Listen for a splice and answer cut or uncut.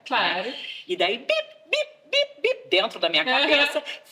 uncut